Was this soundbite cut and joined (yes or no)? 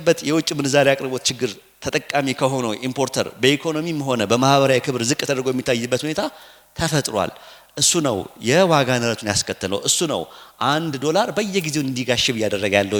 no